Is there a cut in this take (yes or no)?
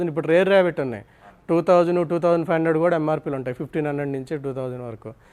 no